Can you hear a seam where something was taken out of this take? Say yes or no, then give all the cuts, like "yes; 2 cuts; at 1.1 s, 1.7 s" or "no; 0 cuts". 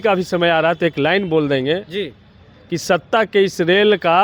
no; 0 cuts